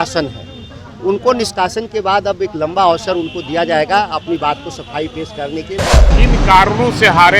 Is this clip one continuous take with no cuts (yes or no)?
no